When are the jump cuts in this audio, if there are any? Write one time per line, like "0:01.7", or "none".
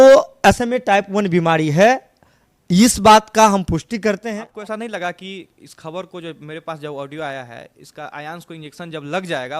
0:04.4